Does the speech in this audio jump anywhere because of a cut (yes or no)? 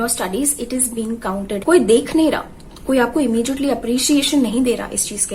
yes